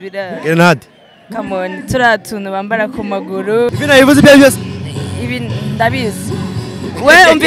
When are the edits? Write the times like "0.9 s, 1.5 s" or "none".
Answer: 3.7 s